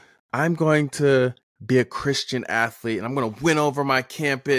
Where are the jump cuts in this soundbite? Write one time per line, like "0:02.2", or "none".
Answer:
0:01.5